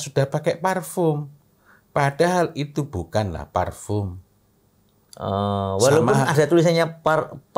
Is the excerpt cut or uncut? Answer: uncut